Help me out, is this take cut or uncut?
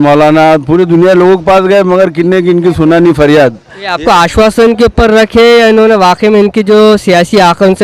uncut